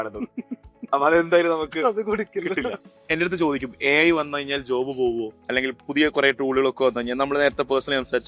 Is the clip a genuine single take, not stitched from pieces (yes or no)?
no